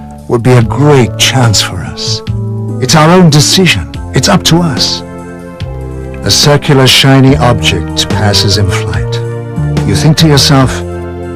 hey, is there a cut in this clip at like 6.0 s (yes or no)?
no